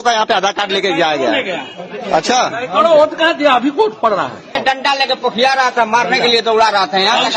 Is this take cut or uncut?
cut